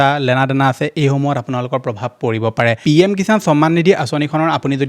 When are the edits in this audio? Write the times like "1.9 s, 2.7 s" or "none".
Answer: 2.8 s